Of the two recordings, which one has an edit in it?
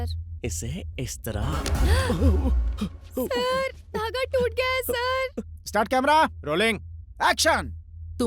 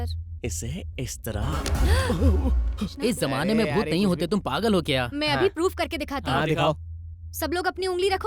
second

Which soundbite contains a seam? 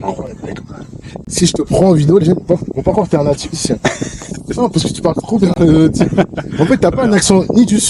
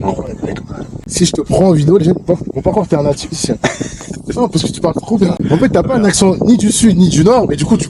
second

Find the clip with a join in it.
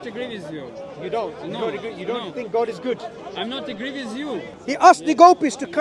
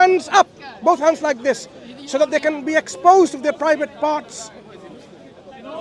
first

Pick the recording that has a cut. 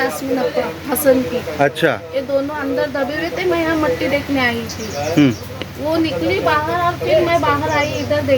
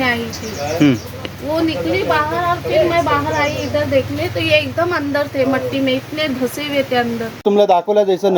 second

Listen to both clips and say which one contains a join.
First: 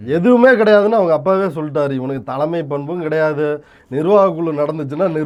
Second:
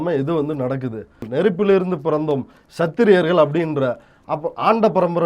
second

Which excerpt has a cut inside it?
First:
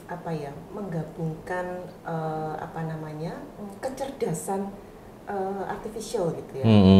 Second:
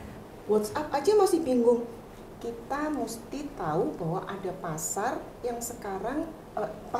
second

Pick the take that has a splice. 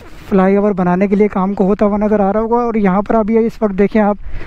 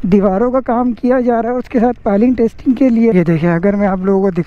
second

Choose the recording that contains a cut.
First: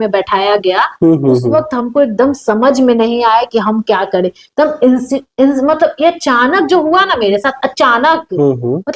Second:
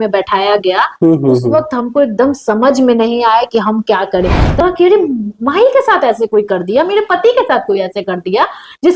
second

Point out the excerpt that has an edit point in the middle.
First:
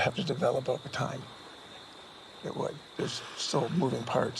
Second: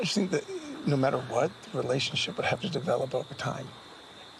first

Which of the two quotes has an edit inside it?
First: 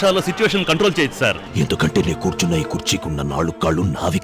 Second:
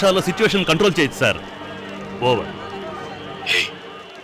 first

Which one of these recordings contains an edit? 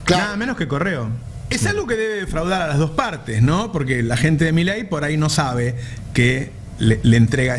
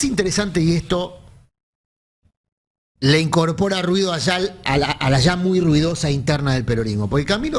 first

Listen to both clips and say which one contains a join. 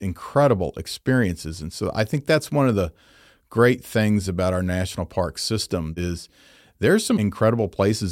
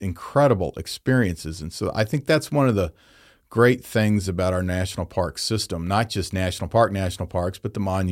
first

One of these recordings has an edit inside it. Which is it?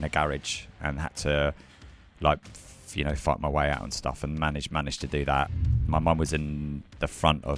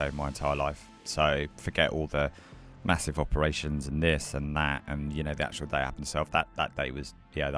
first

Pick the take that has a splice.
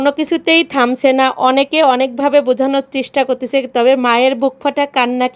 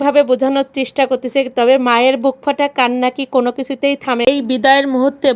second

